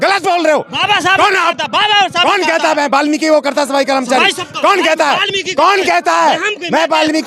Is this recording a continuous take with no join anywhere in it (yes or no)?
yes